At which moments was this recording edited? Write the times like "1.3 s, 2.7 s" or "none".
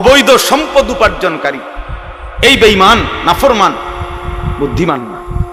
none